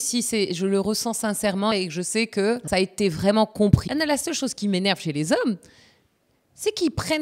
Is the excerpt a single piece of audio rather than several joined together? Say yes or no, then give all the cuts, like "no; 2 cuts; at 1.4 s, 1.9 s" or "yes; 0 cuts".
no; 3 cuts; at 1.7 s, 2.6 s, 3.8 s